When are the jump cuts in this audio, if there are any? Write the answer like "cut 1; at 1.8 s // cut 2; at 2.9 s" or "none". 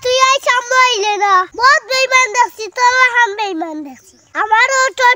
cut 1; at 1.5 s